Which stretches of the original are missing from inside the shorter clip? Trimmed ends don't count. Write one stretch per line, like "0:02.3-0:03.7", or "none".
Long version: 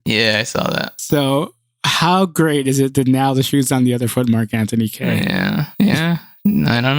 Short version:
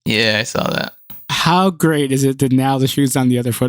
0:01.0-0:01.5